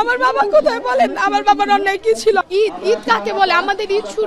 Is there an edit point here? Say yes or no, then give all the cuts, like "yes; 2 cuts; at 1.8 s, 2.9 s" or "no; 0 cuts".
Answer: yes; 1 cut; at 2.5 s